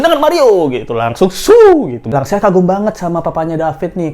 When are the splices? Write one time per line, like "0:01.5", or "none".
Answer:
0:02.1

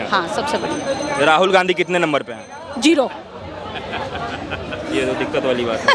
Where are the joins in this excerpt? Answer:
none

